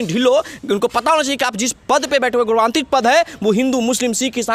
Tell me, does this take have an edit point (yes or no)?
no